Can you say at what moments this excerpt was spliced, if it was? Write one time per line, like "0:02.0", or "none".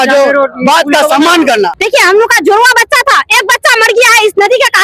0:01.7